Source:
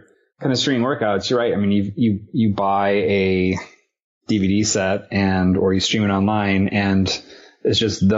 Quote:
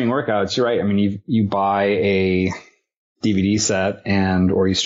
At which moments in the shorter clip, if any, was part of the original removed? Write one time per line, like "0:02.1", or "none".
0:01.2